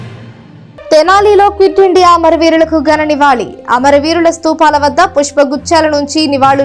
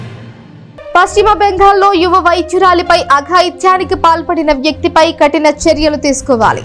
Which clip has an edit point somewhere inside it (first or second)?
first